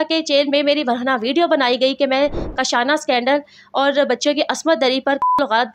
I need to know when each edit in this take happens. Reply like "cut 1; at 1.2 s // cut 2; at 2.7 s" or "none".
none